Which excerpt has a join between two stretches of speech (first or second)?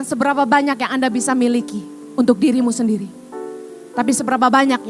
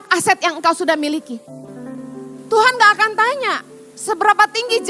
second